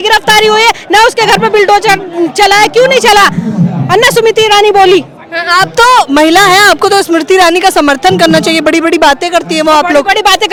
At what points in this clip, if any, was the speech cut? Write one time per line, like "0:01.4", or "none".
none